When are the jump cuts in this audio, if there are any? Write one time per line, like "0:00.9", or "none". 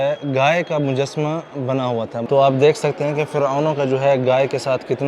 0:02.2